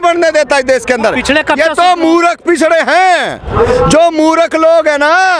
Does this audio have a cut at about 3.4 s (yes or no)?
no